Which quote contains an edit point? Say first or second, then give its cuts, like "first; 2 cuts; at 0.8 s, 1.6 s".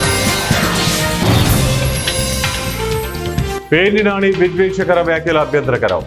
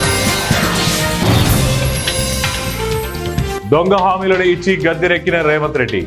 second; 1 cut; at 3.6 s